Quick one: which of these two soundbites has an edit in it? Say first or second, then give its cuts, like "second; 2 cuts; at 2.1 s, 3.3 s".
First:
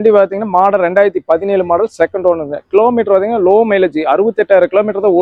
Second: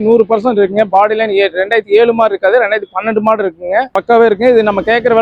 second; 1 cut; at 3.9 s